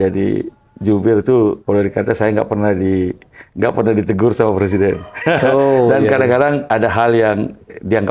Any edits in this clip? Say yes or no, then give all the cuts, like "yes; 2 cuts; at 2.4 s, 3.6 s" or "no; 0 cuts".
yes; 2 cuts; at 1.6 s, 6.6 s